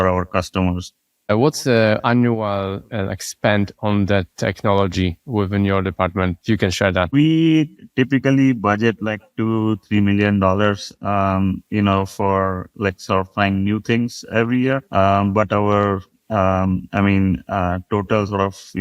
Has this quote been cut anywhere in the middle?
yes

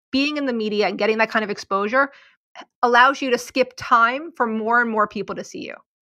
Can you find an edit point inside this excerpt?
yes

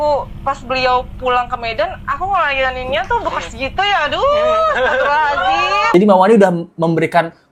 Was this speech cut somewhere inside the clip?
no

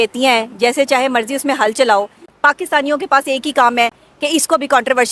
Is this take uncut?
no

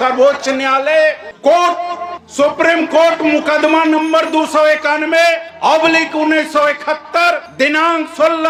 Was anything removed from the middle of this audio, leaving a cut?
no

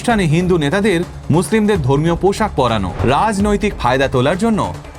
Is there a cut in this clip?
yes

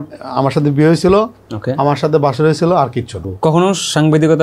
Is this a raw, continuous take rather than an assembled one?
no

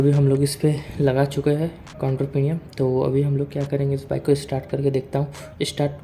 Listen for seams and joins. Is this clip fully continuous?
yes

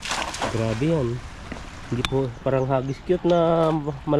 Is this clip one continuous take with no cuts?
yes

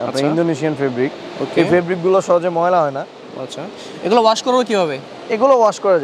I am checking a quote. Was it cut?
no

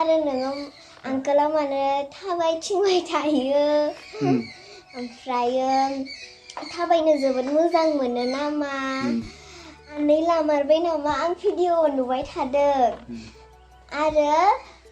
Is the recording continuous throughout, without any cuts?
no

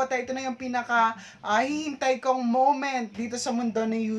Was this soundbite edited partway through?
no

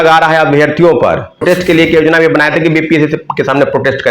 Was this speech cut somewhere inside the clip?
yes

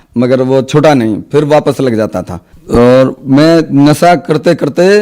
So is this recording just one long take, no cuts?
no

